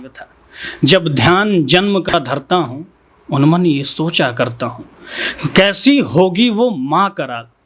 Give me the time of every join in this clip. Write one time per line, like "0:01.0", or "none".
none